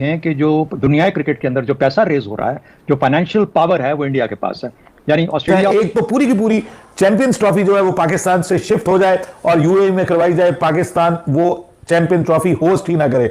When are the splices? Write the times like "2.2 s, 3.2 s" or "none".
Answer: 5.6 s